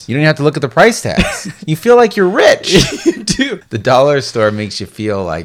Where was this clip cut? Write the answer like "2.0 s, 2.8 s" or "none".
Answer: 3.7 s